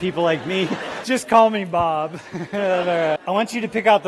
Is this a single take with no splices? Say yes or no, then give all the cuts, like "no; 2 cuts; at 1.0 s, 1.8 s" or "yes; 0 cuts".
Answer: no; 2 cuts; at 0.9 s, 3.2 s